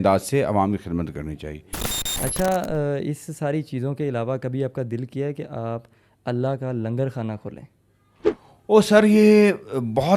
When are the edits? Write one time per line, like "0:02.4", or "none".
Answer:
0:01.6